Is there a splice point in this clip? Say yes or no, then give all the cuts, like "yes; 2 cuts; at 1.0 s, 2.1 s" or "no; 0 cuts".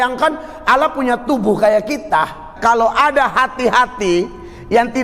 yes; 1 cut; at 2.5 s